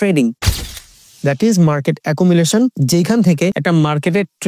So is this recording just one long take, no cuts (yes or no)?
no